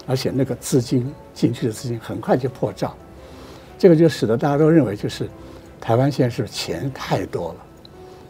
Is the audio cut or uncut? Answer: cut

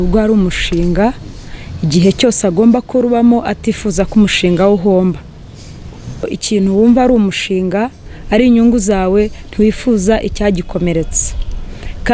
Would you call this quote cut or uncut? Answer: cut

